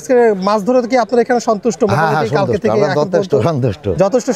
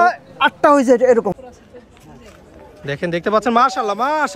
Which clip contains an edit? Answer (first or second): second